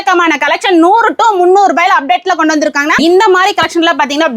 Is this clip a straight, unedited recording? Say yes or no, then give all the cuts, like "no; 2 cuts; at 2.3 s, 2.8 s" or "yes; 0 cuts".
no; 1 cut; at 3.0 s